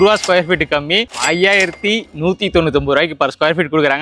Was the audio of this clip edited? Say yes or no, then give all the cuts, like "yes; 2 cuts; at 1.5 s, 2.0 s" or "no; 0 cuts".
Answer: no; 0 cuts